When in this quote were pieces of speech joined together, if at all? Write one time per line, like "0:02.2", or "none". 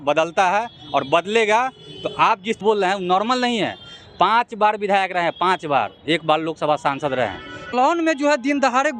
0:02.6
0:07.7